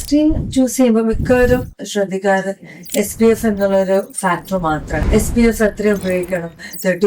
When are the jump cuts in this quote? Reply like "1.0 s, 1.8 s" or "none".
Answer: 4.9 s